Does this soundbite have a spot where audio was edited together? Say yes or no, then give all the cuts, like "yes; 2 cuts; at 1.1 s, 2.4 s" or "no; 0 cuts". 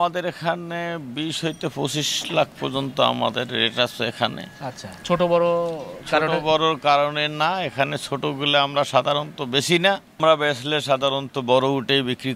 no; 0 cuts